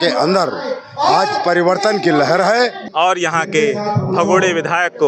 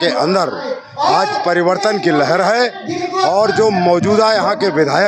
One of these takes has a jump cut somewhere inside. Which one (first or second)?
first